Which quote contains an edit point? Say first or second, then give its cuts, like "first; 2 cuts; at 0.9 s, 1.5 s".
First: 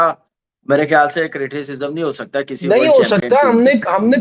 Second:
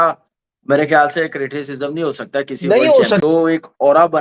second; 1 cut; at 3.2 s